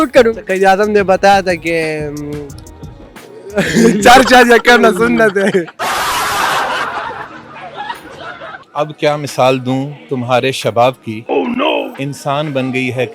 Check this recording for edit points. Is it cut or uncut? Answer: cut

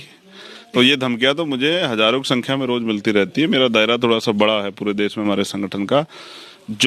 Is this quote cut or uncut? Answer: uncut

